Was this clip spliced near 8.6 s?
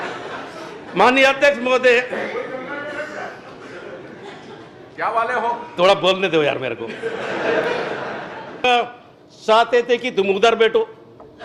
yes; 1 cut; at 8.6 s

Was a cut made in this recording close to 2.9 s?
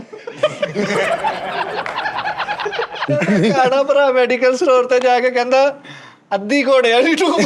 yes; 1 cut; at 2.9 s

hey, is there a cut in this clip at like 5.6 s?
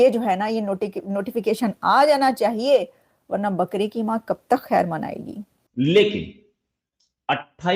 yes; 1 cut; at 5.6 s

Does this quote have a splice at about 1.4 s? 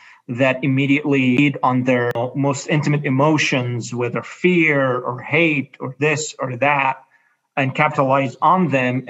yes; 2 cuts; at 1.4 s, 2.2 s

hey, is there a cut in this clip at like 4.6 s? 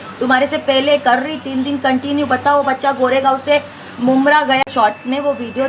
yes; 1 cut; at 4.6 s

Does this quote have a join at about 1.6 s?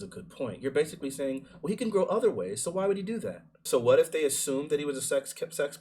no; 1 cut; at 3.6 s

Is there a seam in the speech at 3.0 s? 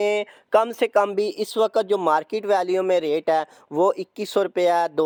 no; 0 cuts

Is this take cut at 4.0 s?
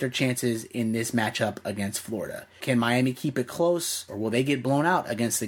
yes; 1 cut; at 4.0 s

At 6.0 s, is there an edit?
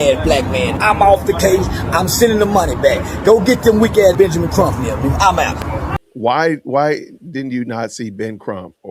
yes; 1 cut; at 6.0 s

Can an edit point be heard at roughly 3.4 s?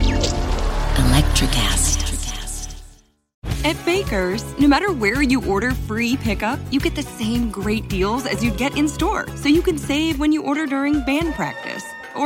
yes; 1 cut; at 3.4 s

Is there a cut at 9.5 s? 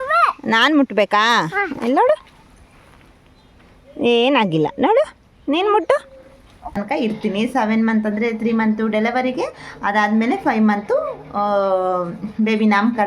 no; 1 cut; at 6.8 s

